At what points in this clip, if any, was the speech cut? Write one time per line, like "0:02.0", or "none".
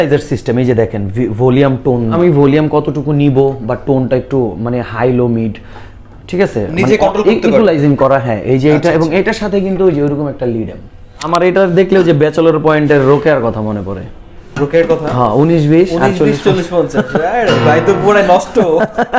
0:02.1
0:11.3